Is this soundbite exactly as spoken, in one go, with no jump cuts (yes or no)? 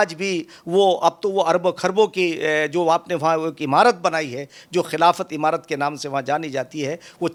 yes